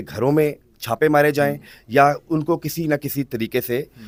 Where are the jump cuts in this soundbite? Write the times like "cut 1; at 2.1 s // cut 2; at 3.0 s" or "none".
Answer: none